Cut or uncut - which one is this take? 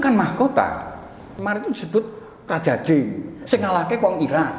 cut